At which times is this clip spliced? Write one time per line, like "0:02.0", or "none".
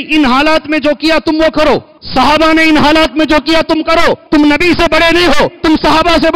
0:02.0
0:04.2
0:05.5

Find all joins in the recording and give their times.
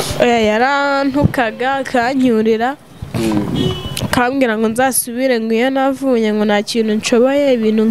none

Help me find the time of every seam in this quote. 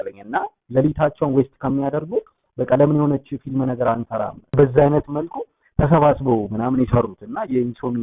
0:04.5

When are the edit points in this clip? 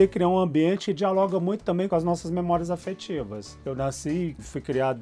0:00.9
0:01.9

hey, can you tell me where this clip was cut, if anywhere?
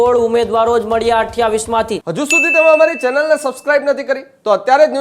0:02.0

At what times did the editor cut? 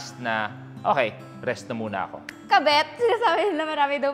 0:02.3

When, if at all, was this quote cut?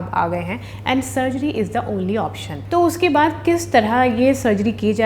none

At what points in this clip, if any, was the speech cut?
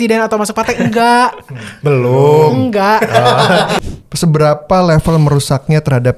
0:03.8

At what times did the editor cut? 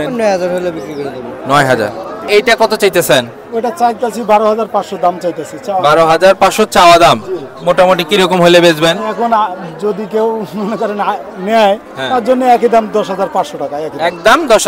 0:02.3

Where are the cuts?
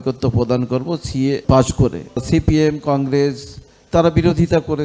0:01.4
0:02.2

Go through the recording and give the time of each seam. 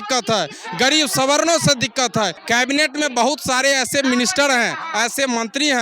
0:02.4

